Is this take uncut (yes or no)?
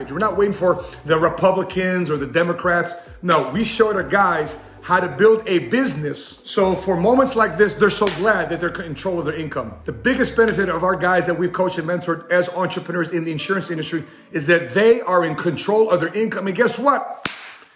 yes